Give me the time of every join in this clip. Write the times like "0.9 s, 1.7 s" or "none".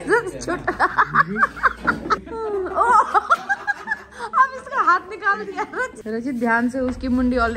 2.3 s, 6.0 s